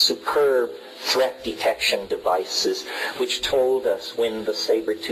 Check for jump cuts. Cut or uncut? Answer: uncut